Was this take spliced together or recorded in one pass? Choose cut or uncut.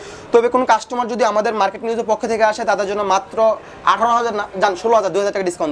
uncut